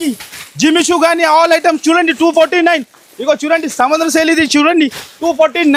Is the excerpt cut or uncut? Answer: uncut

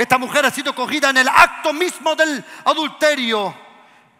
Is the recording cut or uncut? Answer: uncut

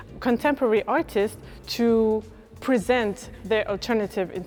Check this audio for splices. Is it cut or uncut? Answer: uncut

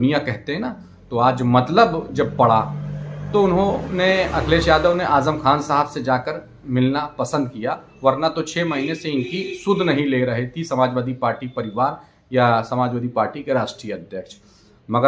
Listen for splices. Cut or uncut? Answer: uncut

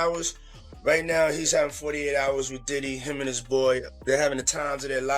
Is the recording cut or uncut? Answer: cut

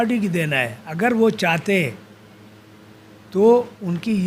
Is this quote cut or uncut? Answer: uncut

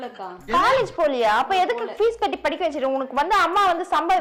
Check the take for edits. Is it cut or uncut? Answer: uncut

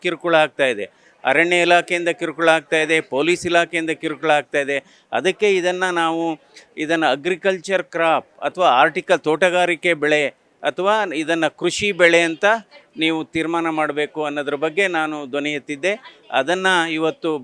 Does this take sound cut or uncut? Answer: uncut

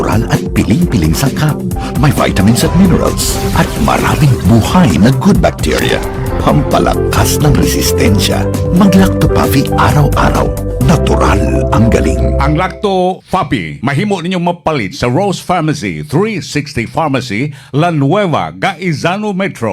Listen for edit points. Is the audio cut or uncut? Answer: cut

